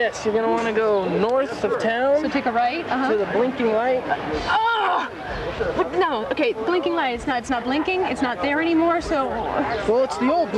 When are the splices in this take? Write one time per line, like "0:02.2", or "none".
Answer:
0:06.2